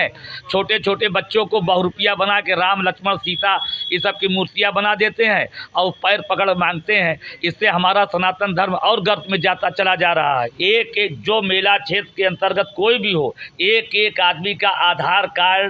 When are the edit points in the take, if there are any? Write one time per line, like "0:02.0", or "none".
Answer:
0:10.5